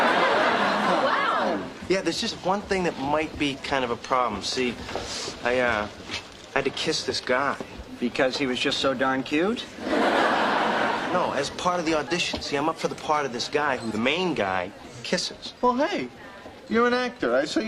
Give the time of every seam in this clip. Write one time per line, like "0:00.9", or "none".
0:10.5
0:14.1